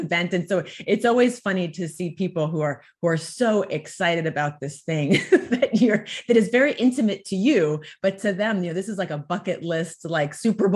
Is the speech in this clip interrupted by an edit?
no; 0 cuts

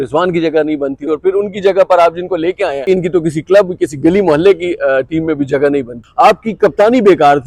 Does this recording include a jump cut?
yes; 3 cuts; at 1.0 s, 2.9 s, 6.0 s

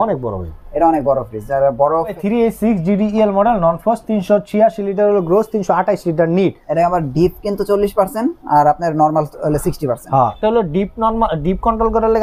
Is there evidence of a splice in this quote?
yes; 2 cuts; at 2.1 s, 10.4 s

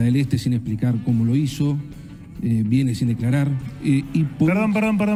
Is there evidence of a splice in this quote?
no; 0 cuts

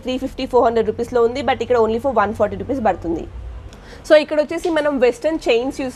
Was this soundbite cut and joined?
no; 0 cuts

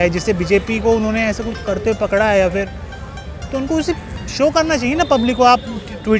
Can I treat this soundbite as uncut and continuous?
yes; 0 cuts

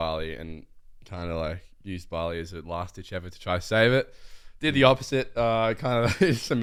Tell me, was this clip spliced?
no; 0 cuts

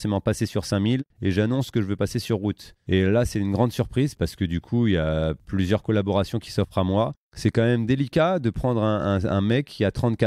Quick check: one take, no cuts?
no; 5 cuts; at 1.1 s, 2.7 s, 4.1 s, 5.4 s, 7.2 s

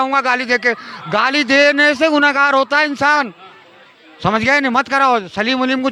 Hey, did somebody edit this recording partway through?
no; 0 cuts

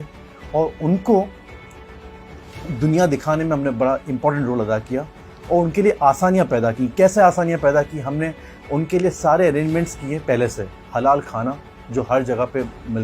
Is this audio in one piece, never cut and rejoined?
yes; 0 cuts

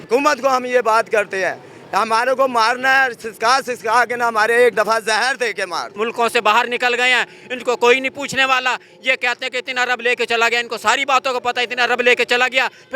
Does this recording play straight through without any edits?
no; 1 cut; at 5.9 s

